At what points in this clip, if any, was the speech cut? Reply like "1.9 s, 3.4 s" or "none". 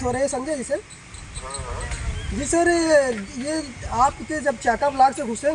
none